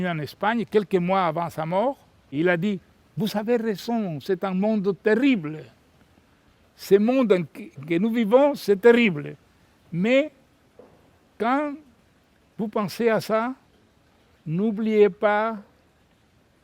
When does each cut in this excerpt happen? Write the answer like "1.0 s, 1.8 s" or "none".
2.4 s